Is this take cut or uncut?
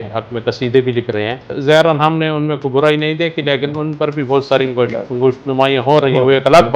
cut